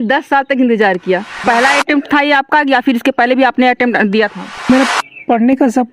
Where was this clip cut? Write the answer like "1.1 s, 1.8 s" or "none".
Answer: 1.4 s, 4.7 s